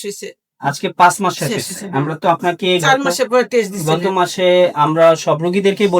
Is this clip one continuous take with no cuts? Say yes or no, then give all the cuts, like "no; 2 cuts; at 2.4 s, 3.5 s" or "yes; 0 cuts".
yes; 0 cuts